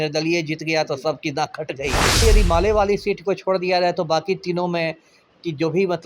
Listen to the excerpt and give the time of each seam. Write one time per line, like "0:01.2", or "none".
0:02.2